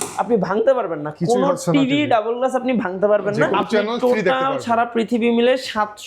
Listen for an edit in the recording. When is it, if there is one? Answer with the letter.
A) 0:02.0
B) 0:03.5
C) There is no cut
B